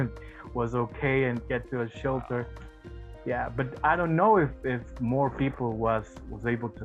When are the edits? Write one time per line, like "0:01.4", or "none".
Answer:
none